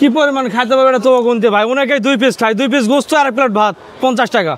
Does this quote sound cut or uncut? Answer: uncut